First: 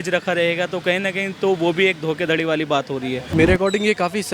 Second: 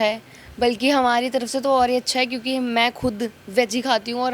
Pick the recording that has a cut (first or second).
first